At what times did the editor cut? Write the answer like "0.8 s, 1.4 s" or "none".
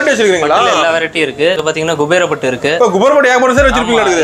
1.6 s